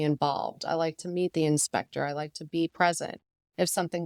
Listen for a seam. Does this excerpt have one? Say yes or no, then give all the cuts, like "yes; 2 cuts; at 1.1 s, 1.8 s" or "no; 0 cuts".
no; 0 cuts